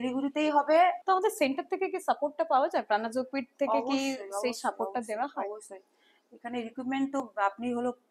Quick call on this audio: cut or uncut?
uncut